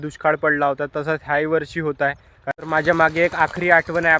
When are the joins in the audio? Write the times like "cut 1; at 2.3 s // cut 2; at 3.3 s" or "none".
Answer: cut 1; at 2.5 s